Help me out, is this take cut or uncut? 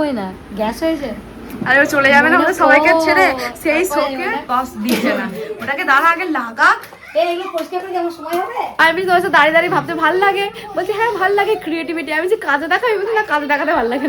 cut